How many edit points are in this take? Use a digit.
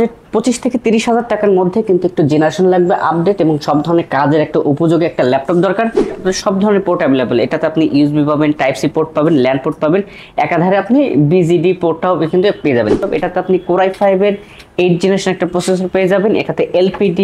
2